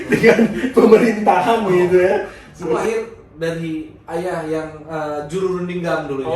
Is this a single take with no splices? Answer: no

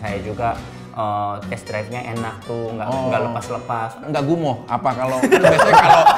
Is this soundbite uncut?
no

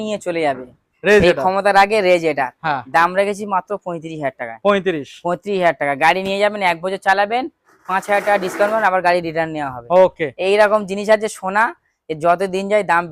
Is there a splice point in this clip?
no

